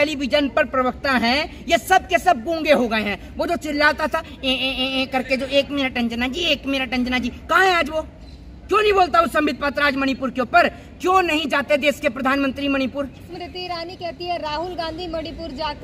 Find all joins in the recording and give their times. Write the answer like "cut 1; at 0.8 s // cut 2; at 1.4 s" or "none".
cut 1; at 13.3 s